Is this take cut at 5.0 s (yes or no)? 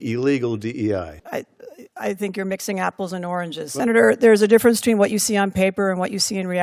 no